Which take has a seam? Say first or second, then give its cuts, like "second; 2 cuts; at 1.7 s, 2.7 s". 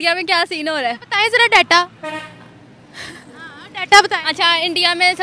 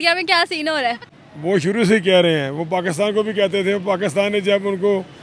second; 1 cut; at 1.0 s